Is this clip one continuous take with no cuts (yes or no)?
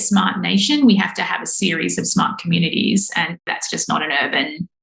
no